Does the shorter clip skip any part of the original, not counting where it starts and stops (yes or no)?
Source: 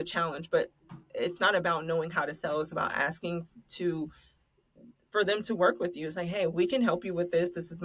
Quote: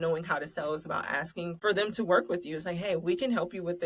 yes